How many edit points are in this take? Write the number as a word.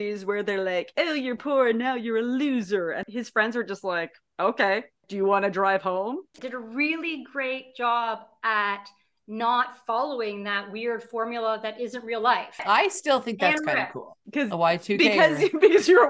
three